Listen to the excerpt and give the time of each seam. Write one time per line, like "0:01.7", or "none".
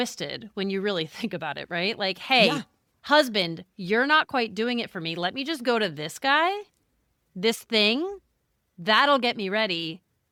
none